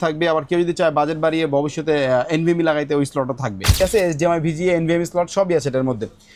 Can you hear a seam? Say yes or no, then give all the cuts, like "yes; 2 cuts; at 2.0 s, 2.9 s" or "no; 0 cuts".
yes; 1 cut; at 3.8 s